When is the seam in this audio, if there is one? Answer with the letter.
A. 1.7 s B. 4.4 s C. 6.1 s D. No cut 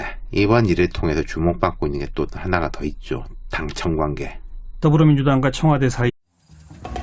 D